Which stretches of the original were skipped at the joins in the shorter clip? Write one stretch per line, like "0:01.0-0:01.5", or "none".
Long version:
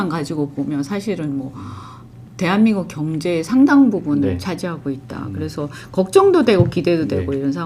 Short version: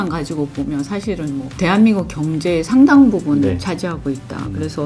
0:01.5-0:02.3